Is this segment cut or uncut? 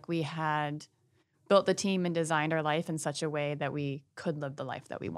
uncut